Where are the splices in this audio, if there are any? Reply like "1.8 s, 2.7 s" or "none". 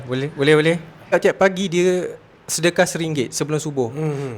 1.1 s